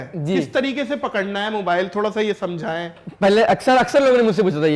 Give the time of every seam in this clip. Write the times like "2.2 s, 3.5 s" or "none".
none